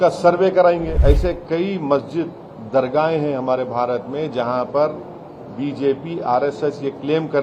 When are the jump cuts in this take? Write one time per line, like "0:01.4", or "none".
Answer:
0:00.9